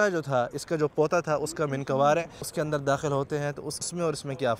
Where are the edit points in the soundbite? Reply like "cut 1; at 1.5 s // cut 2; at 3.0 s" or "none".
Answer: cut 1; at 2.5 s // cut 2; at 3.9 s